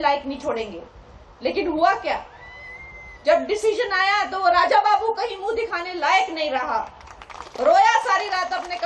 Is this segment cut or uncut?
uncut